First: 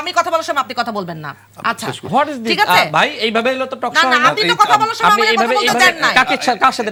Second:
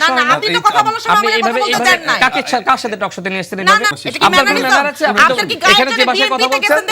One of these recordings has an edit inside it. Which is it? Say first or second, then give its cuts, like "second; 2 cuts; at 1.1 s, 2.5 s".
second; 1 cut; at 3.9 s